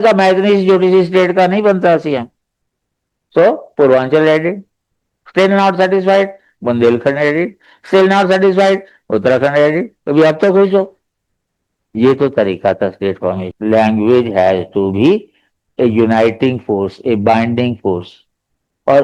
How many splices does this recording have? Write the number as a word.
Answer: one